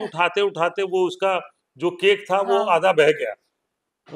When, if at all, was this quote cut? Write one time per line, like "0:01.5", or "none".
none